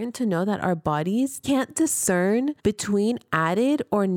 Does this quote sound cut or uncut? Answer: cut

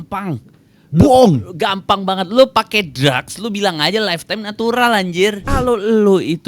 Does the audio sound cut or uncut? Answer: cut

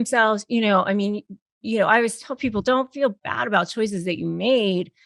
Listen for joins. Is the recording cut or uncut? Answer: uncut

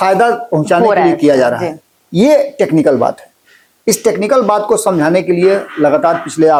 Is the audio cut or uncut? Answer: uncut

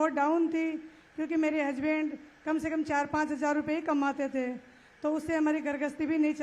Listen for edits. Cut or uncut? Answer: uncut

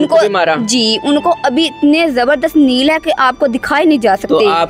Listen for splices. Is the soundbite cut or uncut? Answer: uncut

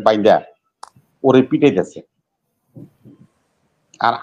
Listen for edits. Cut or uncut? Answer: uncut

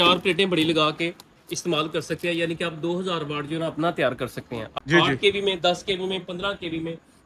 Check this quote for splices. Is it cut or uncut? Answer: cut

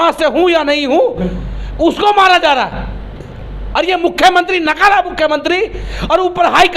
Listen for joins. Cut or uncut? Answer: uncut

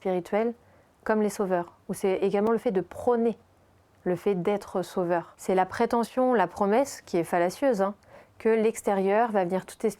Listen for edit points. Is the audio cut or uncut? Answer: cut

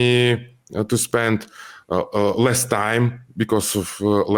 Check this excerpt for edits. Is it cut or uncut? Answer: uncut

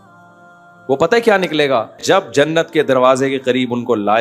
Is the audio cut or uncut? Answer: cut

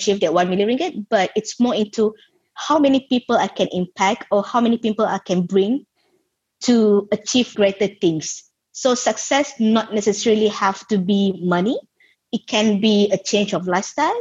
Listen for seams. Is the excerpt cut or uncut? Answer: uncut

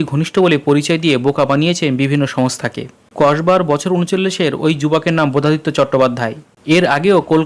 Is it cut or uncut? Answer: cut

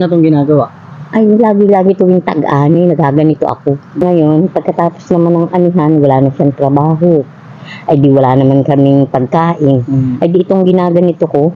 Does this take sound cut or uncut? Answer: cut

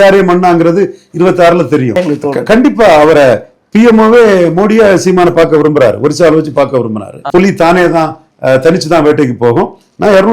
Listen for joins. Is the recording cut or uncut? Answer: cut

